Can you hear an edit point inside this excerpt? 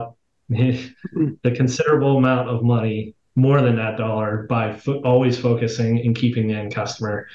no; 0 cuts

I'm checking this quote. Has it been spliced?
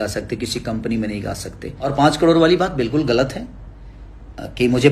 yes; 1 cut; at 1.9 s

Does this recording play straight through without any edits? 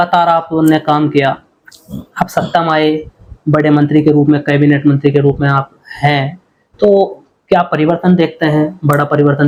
yes; 0 cuts

